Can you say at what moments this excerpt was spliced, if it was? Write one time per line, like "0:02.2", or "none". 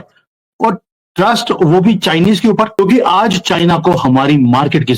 0:02.7